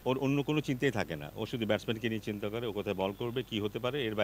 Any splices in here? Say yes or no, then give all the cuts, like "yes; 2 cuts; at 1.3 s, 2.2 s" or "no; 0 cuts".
no; 0 cuts